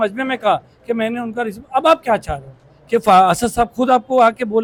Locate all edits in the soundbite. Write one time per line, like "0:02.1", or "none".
none